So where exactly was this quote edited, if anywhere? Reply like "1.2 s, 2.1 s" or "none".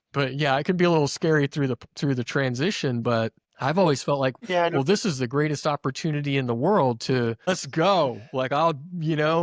7.5 s